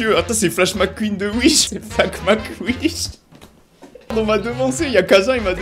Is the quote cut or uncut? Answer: uncut